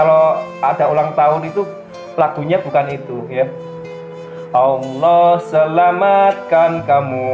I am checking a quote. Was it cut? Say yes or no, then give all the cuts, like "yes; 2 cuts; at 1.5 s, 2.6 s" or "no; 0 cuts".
no; 0 cuts